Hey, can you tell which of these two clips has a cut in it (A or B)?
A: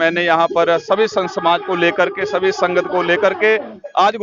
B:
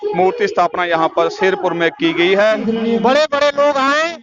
B